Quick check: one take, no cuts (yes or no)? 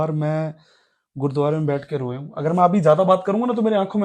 yes